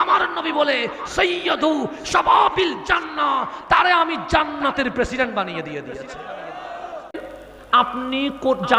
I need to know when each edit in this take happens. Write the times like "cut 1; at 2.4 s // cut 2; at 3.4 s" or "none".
cut 1; at 7.2 s